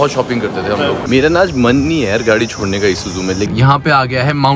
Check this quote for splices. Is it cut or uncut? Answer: cut